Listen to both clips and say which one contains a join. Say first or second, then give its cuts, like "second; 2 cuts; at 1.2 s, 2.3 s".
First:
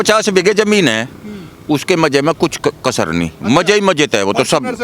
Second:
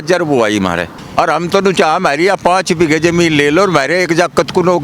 second; 1 cut; at 1.0 s